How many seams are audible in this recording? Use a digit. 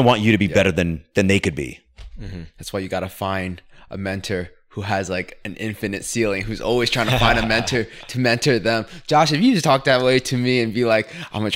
0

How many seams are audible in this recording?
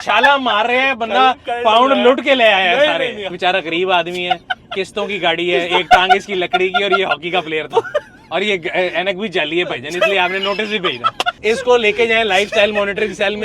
2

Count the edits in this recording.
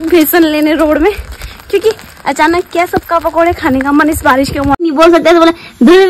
1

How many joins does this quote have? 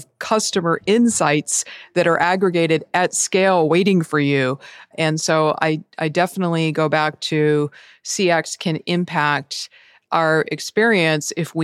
0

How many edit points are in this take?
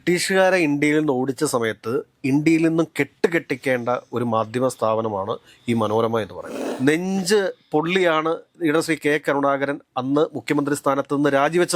1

